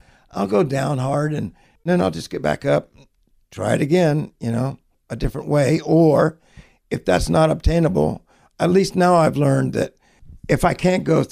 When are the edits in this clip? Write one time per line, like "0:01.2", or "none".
0:01.9